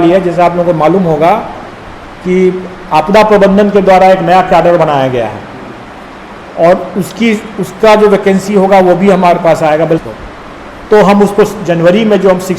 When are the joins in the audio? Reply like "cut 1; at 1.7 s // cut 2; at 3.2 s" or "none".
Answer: cut 1; at 10.0 s